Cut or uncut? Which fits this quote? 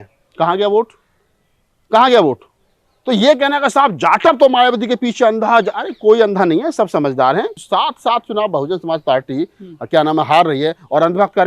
cut